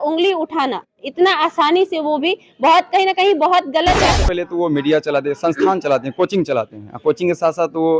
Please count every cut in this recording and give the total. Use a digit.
1